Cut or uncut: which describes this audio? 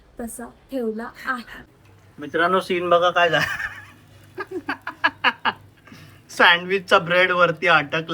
cut